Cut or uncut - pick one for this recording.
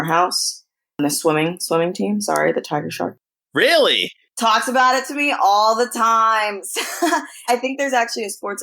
uncut